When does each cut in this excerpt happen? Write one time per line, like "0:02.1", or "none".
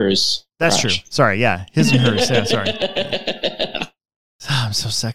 none